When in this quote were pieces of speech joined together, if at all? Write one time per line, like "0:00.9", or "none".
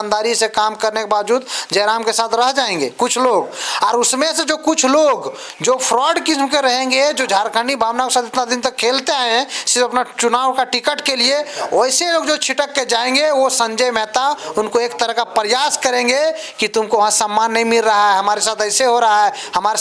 none